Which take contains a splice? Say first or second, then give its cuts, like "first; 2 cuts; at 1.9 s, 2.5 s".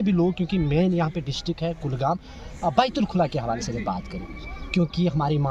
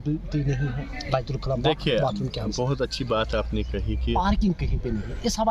second; 1 cut; at 4.1 s